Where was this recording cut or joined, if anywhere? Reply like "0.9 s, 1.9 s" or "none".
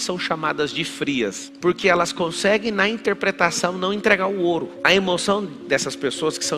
1.5 s